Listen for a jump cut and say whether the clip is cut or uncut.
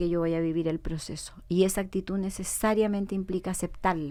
uncut